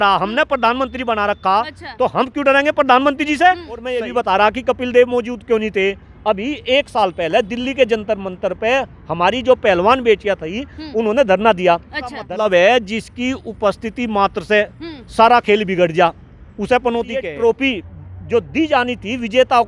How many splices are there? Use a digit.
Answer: 3